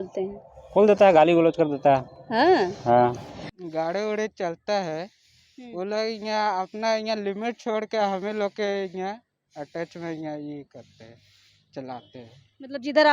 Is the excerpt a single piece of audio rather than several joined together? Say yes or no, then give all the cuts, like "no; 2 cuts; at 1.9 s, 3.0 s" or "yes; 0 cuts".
no; 1 cut; at 3.4 s